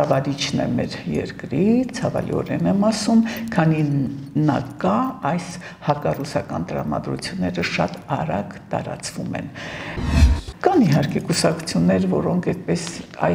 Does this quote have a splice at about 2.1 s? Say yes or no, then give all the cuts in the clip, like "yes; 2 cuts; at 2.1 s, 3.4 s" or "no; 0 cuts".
no; 1 cut; at 10.0 s